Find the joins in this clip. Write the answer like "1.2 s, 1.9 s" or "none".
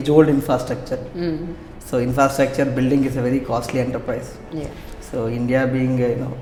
none